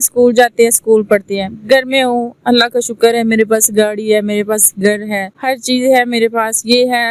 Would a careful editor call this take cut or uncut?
cut